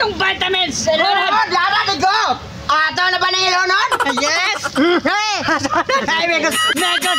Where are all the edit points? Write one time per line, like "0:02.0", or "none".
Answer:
none